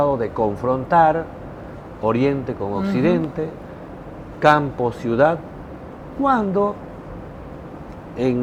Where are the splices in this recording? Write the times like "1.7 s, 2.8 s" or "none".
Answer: none

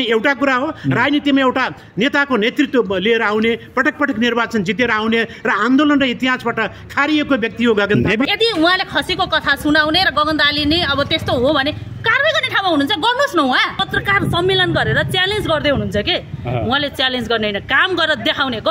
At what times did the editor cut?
8.3 s, 13.8 s

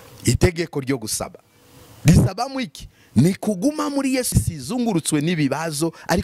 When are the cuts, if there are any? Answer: 4.3 s

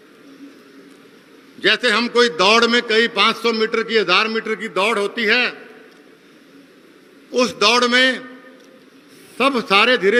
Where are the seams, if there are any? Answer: none

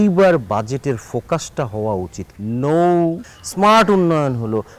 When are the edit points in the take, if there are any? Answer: none

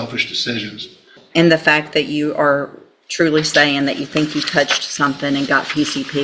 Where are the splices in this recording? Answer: 1.2 s

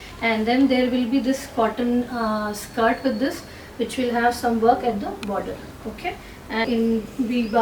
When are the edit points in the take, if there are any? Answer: 6.6 s

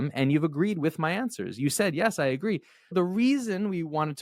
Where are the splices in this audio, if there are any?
2.9 s

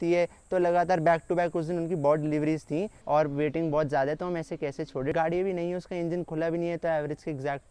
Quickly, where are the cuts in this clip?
3.0 s, 5.1 s

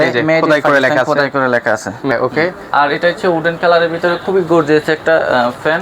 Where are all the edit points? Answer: 2.1 s

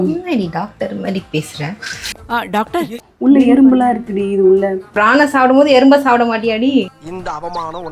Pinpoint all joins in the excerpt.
3.0 s, 4.9 s, 6.9 s

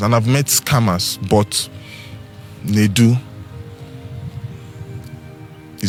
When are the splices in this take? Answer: none

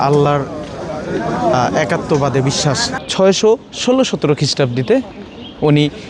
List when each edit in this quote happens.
3.0 s

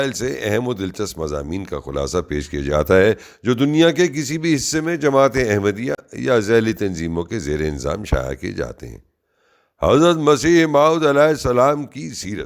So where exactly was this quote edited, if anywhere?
3.9 s

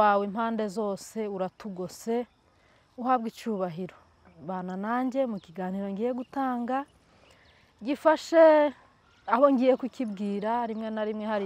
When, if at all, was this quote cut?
none

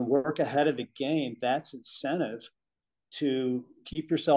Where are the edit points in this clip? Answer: none

